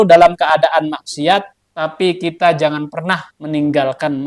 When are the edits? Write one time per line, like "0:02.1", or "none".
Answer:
0:01.6
0:03.3